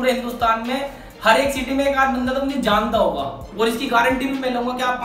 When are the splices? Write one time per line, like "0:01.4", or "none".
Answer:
0:03.4